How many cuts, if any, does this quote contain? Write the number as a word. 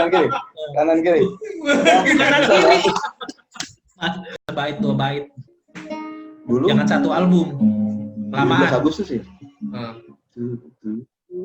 one